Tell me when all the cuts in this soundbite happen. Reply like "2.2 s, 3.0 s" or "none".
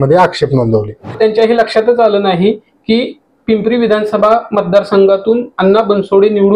1.2 s